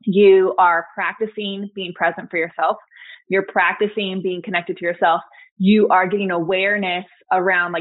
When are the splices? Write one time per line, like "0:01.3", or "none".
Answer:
none